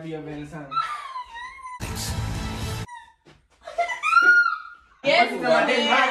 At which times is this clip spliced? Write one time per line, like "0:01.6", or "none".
0:05.0